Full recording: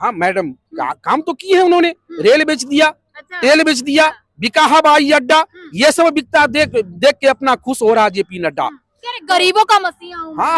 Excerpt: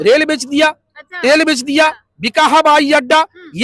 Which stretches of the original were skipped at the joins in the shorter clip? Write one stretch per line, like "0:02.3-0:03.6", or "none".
none